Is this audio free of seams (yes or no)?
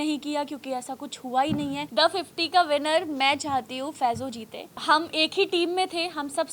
no